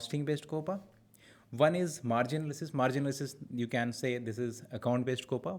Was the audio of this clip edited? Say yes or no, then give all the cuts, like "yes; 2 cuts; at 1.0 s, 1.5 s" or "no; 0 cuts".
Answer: no; 0 cuts